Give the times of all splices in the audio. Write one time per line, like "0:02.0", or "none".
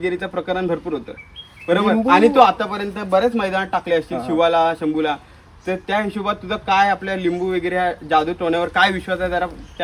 none